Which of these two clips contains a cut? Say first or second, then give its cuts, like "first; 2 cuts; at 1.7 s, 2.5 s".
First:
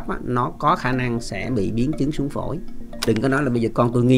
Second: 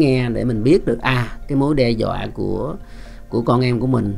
first; 1 cut; at 3.0 s